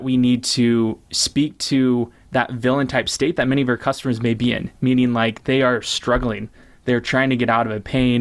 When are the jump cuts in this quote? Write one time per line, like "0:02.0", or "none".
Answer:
none

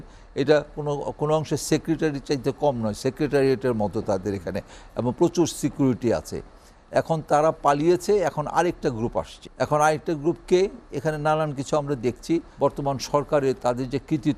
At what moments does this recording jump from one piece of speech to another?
0:09.4
0:12.5

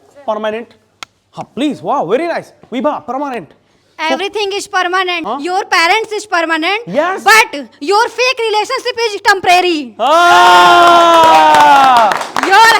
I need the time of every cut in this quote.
0:05.2

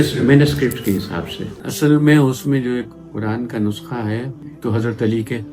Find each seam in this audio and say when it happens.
0:01.4

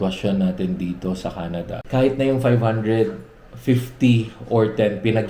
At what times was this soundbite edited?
0:01.8

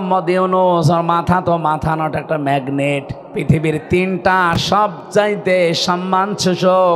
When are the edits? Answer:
none

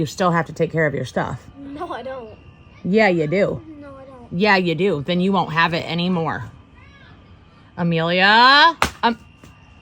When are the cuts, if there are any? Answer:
0:08.6

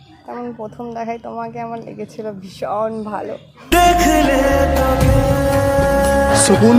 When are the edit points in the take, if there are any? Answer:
none

